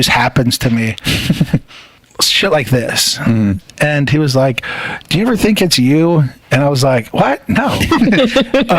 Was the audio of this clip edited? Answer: yes; 1 cut; at 1.9 s

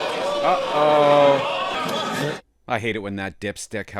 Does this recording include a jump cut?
yes; 1 cut; at 1.8 s

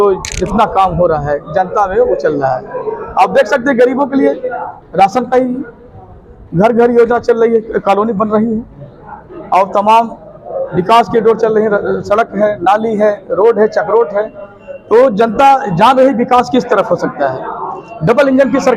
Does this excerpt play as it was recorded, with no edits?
yes; 0 cuts

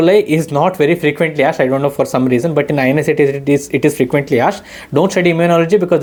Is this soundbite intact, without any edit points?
yes; 0 cuts

